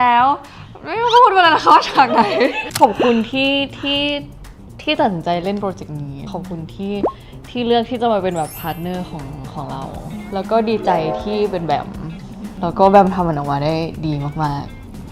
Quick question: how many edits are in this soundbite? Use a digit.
4